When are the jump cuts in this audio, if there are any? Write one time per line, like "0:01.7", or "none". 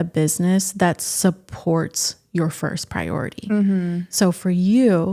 none